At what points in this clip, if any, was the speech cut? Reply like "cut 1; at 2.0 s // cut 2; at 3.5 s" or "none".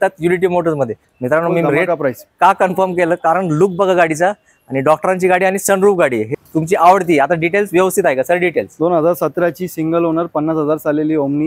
cut 1; at 1.0 s // cut 2; at 6.3 s